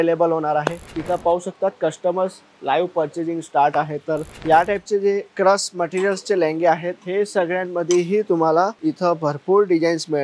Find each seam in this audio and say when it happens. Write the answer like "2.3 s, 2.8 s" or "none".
0.9 s, 4.3 s